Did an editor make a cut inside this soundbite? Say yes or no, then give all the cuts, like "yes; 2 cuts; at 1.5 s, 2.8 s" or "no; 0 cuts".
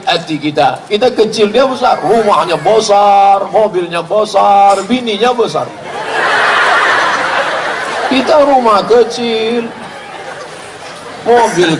no; 0 cuts